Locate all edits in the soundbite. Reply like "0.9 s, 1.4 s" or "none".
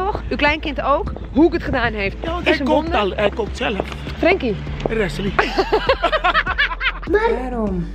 7.0 s